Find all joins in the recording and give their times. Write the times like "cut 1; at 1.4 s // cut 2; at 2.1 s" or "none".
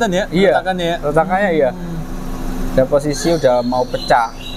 none

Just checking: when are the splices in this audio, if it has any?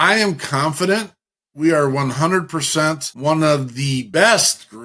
cut 1; at 3.1 s // cut 2; at 4.0 s

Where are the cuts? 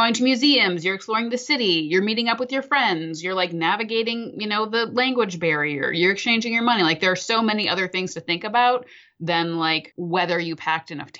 cut 1; at 9.9 s

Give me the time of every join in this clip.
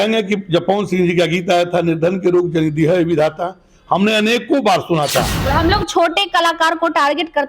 cut 1; at 5.4 s

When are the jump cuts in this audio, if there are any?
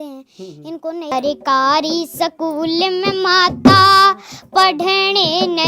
cut 1; at 1.1 s

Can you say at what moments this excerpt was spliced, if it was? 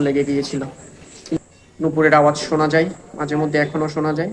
cut 1; at 1.4 s

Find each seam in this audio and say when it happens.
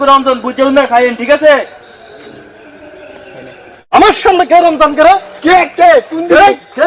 cut 1; at 3.9 s

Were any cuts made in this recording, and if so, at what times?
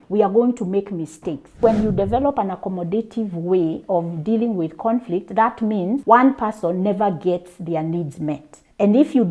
cut 1; at 1.6 s

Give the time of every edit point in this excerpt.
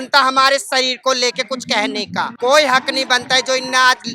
cut 1; at 2.3 s

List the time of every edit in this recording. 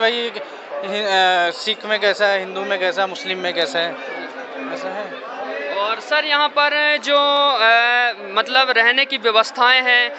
none

